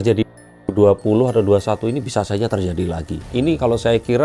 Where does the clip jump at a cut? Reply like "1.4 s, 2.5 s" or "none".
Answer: 3.2 s